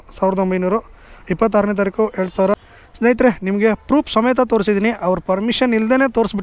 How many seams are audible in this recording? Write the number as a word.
one